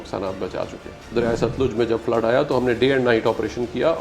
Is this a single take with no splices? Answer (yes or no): no